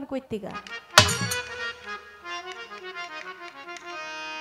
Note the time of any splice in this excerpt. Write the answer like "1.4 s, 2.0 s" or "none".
none